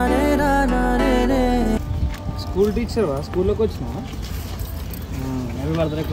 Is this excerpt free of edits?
yes; 0 cuts

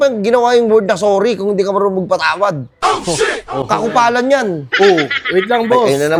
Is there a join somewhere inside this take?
no; 0 cuts

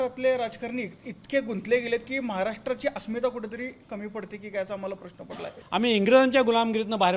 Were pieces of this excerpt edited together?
yes; 1 cut; at 5.6 s

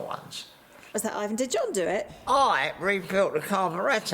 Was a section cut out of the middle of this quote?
yes; 1 cut; at 1.0 s

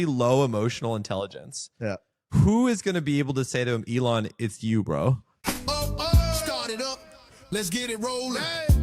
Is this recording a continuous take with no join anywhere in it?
no; 1 cut; at 5.3 s

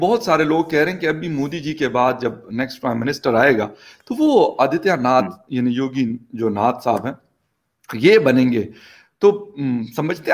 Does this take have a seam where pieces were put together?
no; 0 cuts

